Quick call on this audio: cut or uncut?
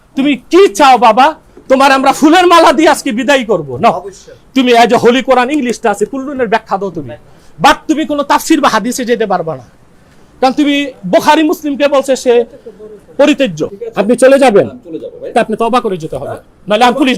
cut